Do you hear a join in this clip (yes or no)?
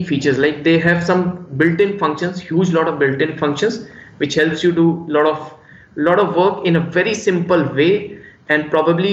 no